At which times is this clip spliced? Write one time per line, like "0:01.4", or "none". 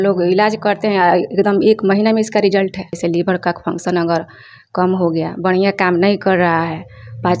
0:03.0